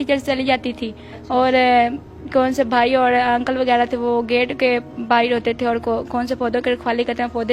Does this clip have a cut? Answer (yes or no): no